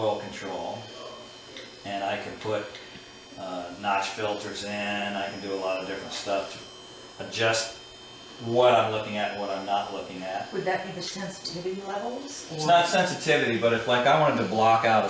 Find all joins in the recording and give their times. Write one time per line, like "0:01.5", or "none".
0:11.1